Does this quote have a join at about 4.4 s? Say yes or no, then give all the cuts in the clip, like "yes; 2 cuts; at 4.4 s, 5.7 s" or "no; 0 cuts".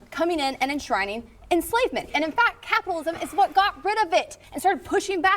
yes; 2 cuts; at 2.1 s, 4.4 s